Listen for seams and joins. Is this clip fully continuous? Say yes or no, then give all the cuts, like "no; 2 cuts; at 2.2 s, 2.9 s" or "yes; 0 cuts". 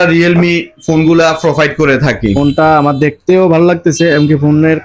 no; 1 cut; at 2.3 s